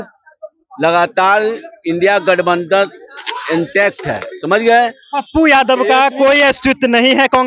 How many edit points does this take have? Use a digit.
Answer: 0